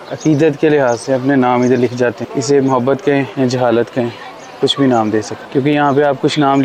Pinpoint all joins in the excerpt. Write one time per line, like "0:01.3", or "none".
0:02.2
0:03.3
0:05.4